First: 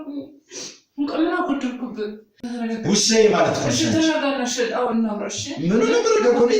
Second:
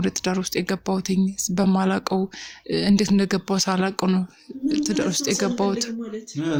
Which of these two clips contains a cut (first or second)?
first